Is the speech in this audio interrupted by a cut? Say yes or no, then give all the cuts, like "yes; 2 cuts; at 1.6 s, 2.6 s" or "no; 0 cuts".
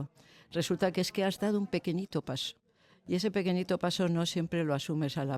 no; 0 cuts